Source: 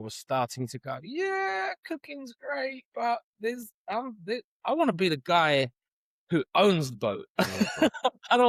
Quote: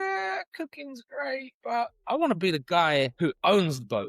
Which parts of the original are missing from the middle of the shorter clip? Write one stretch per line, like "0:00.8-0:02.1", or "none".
0:03.3-0:04.5
0:05.7-0:06.2